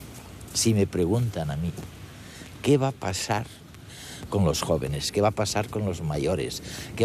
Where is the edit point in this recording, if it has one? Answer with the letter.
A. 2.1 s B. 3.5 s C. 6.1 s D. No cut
B